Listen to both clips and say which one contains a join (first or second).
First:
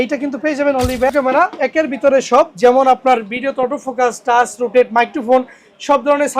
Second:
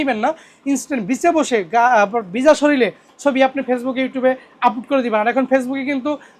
first